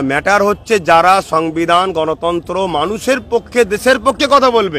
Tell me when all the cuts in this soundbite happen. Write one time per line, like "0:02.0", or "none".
none